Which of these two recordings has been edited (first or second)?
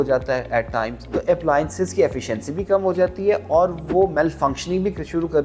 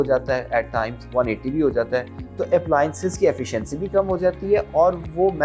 first